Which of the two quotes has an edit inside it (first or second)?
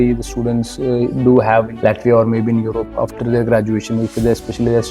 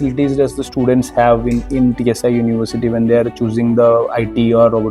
first